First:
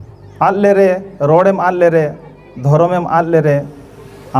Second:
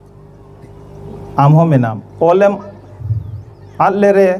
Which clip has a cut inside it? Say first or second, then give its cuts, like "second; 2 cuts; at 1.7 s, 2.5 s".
second; 1 cut; at 2.0 s